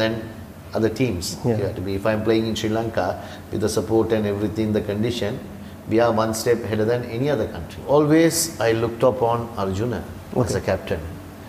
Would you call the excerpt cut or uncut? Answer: cut